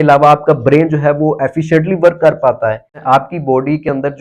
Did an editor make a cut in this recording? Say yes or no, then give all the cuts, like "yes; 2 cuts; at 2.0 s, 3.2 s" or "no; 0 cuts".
yes; 1 cut; at 3.0 s